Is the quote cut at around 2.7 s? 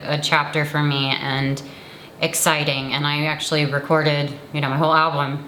no; 0 cuts

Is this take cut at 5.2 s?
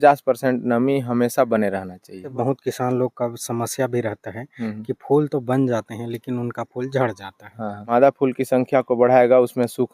no; 2 cuts; at 2.3 s, 7.8 s

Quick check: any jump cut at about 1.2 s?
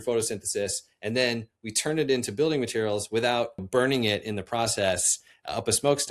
no; 1 cut; at 3.6 s

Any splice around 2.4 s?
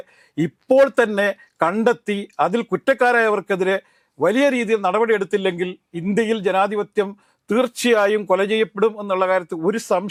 no; 0 cuts

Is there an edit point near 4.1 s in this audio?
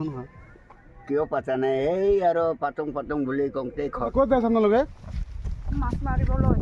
yes; 1 cut; at 4.1 s

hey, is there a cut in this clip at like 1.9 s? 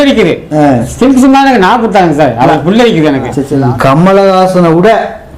no; 1 cut; at 3.5 s

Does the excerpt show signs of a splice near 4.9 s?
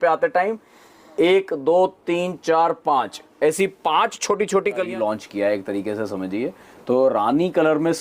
yes; 1 cut; at 4.9 s

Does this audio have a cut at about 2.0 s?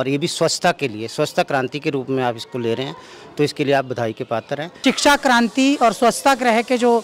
no; 1 cut; at 4.7 s

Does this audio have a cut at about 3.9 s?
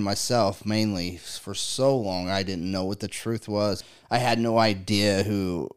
yes; 1 cut; at 3.9 s

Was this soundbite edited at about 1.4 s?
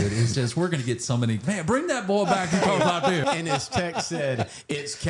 yes; 2 cuts; at 1.4 s, 3.2 s

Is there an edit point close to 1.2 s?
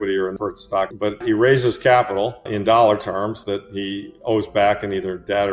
yes; 2 cuts; at 1.2 s, 2.5 s

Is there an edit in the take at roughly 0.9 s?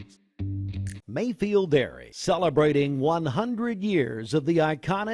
yes; 1 cut; at 0.9 s

